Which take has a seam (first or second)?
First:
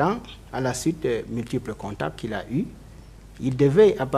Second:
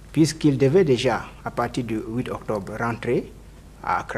first